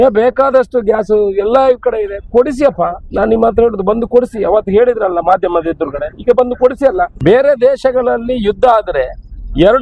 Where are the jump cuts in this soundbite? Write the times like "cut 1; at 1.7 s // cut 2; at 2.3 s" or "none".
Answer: cut 1; at 7.1 s